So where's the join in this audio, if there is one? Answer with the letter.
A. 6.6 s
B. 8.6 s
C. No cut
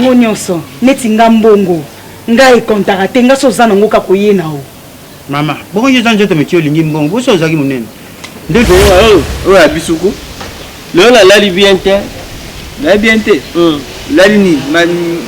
B